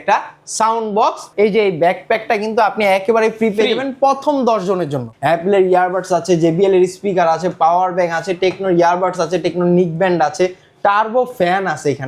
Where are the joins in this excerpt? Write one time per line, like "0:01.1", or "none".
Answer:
0:01.2
0:05.1